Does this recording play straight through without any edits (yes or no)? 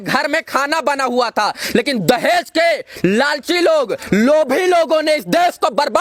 yes